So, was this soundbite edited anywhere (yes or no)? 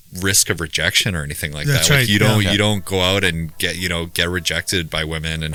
no